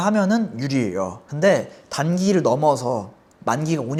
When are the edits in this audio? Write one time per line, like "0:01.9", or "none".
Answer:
none